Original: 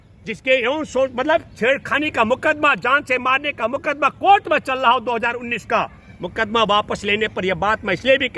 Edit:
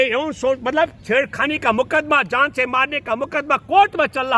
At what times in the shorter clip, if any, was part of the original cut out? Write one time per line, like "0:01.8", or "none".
none